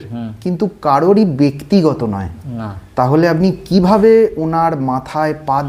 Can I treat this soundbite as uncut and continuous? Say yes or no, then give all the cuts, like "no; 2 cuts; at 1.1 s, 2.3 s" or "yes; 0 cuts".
yes; 0 cuts